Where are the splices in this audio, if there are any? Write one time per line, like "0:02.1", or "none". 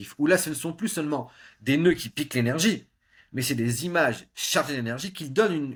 none